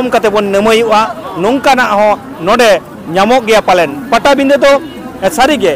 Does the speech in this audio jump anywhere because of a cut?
no; 0 cuts

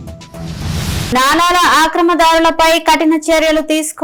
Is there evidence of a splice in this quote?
no; 0 cuts

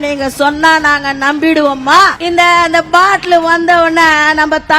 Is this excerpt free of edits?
no; 1 cut; at 2.2 s

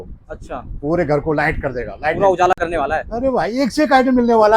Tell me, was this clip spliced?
no; 0 cuts

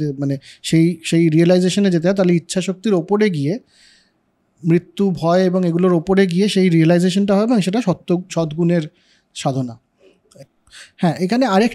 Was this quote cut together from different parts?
no; 0 cuts

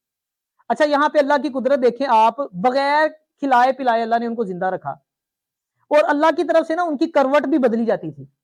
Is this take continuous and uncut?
yes; 0 cuts

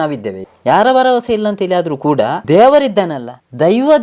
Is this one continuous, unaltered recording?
no; 1 cut; at 2.4 s

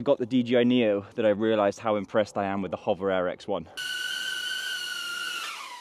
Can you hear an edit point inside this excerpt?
yes; 1 cut; at 3.7 s

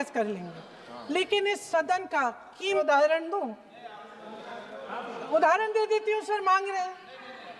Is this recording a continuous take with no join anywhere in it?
no; 1 cut; at 2.8 s

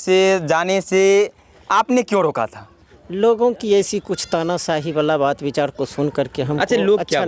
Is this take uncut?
yes; 0 cuts

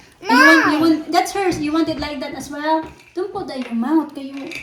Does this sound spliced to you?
no; 0 cuts

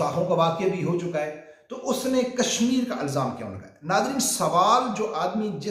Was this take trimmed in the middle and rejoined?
no; 0 cuts

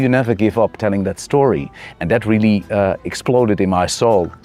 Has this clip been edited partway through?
no; 0 cuts

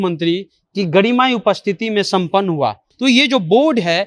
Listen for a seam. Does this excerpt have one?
yes; 1 cut; at 2.9 s

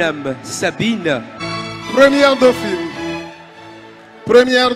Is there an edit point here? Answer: yes; 1 cut; at 1.4 s

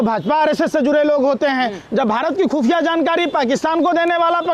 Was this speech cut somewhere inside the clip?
no; 0 cuts

